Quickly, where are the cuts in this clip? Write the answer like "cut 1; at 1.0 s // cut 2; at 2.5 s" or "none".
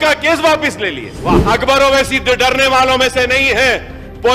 cut 1; at 1.4 s